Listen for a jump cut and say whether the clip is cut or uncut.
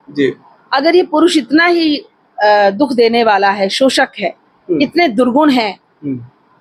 uncut